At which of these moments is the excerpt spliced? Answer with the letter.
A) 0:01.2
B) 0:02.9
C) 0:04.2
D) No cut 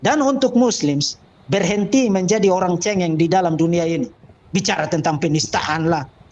C